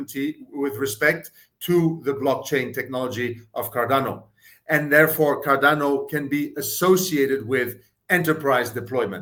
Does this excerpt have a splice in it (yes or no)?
no